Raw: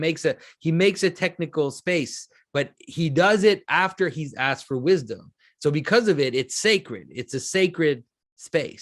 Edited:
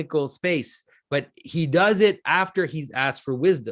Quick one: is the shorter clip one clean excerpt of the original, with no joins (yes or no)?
yes